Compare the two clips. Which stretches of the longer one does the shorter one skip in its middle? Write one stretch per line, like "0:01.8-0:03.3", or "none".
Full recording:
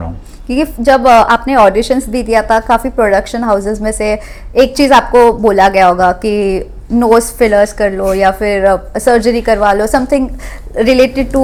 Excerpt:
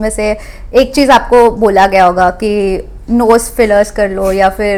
none